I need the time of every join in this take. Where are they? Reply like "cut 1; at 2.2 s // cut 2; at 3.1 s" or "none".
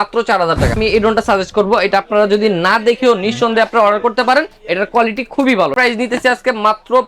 cut 1; at 0.7 s // cut 2; at 5.7 s